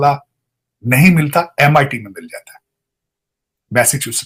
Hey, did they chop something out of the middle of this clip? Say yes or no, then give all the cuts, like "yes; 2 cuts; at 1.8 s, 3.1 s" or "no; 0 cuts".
no; 0 cuts